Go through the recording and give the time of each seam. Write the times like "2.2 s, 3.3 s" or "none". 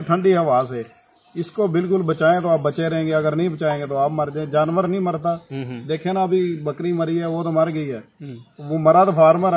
none